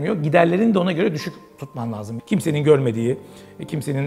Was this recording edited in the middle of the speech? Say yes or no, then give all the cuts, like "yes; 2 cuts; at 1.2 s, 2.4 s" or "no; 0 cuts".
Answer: yes; 1 cut; at 2.1 s